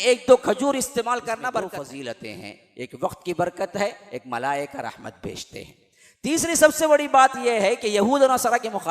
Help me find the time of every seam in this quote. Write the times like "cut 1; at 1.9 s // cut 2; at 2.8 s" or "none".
cut 1; at 1.8 s